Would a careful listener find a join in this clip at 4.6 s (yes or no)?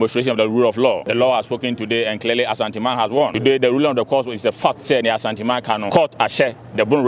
no